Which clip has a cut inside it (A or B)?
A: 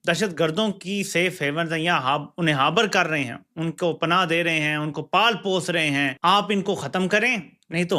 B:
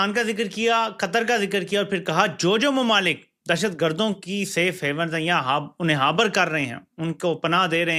A